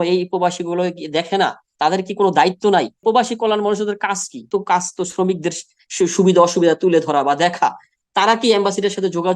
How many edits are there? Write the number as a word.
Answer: two